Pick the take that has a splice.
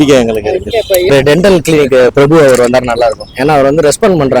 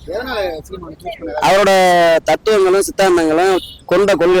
first; 1 cut; at 1.1 s

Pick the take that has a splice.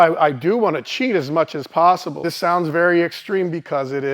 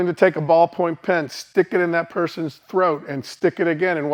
first; 1 cut; at 2.3 s

